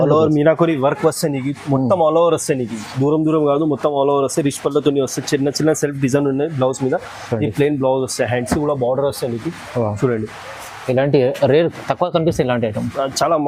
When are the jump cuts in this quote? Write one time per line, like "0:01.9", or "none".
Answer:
none